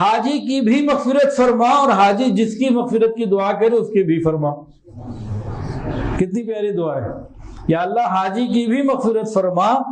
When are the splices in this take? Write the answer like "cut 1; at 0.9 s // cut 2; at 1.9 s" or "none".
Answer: none